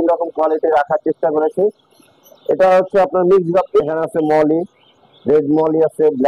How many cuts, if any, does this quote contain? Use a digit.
1